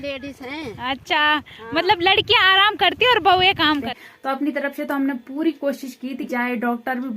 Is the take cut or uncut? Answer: cut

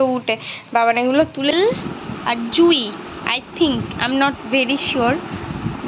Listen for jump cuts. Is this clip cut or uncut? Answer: cut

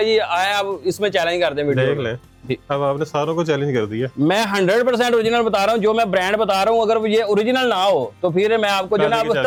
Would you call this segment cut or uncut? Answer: uncut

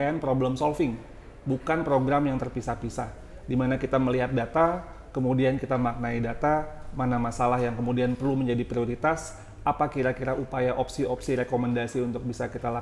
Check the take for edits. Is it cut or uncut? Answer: uncut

